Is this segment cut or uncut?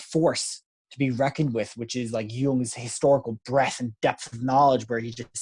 uncut